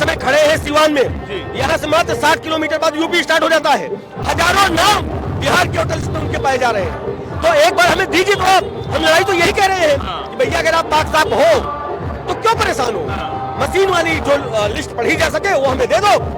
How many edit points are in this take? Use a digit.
0